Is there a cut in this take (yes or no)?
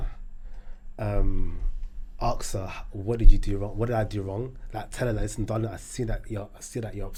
no